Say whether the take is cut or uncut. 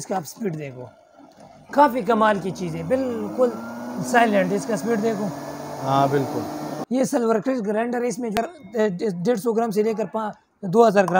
cut